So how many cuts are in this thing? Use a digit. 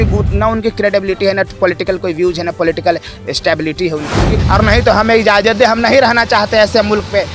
1